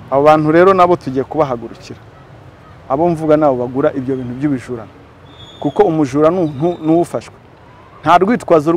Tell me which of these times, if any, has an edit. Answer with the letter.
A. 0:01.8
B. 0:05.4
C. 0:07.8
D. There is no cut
D